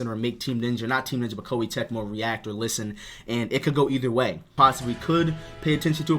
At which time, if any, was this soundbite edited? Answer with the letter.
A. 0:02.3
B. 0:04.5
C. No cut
B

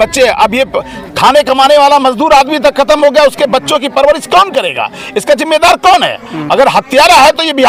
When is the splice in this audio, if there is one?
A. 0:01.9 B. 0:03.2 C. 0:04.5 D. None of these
D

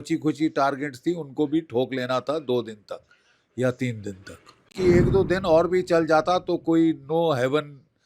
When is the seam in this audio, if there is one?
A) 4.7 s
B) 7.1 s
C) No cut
A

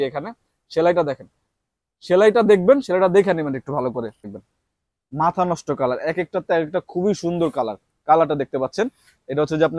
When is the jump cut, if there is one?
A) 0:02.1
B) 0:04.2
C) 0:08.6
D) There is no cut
B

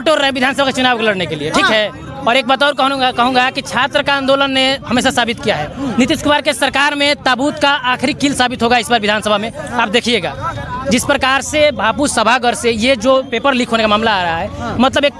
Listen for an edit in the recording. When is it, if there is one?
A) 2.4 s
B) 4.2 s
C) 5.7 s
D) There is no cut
D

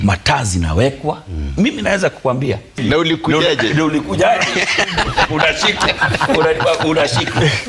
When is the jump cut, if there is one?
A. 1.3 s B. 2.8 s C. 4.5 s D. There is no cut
B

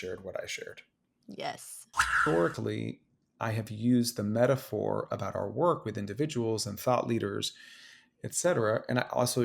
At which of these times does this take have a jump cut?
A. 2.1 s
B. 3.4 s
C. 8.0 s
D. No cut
A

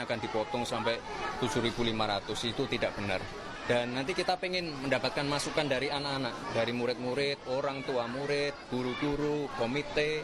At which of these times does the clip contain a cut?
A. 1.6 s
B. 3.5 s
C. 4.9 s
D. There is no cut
B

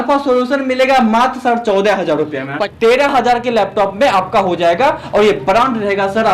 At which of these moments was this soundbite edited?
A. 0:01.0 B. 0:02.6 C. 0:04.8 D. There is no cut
B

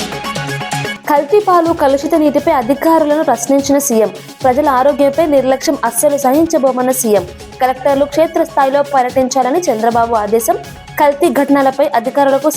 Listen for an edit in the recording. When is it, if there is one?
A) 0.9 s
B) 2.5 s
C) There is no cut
A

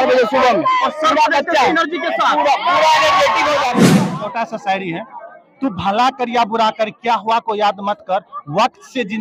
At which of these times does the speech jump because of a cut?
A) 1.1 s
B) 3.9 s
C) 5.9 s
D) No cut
B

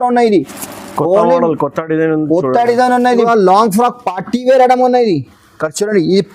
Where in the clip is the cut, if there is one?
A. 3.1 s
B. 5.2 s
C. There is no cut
A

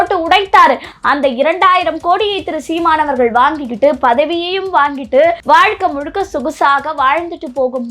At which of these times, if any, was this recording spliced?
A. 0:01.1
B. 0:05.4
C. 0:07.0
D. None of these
B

